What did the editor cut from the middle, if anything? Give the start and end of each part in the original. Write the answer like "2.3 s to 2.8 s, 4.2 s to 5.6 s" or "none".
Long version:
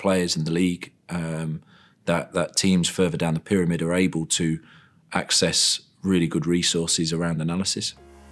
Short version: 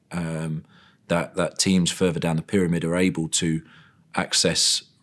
none